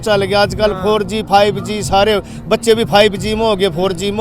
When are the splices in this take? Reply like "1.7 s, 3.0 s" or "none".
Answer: none